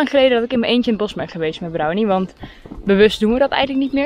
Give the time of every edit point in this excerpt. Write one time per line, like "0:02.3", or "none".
none